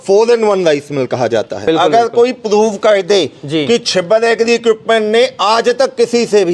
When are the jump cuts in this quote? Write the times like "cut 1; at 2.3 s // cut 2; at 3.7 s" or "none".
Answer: cut 1; at 1.6 s